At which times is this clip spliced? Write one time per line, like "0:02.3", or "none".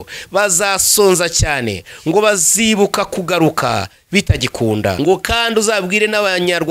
0:05.0

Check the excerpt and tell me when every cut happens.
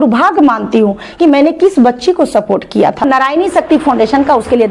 0:03.0

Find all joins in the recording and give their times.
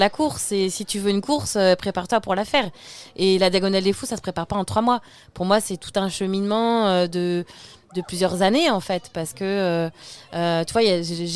none

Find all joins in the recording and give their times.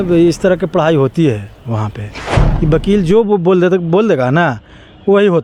none

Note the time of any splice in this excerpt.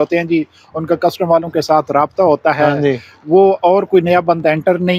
none

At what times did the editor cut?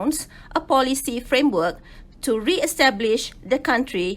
0:01.6

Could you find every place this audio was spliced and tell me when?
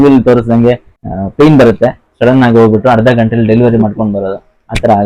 0:00.9

